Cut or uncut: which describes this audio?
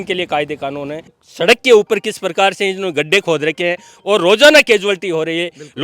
cut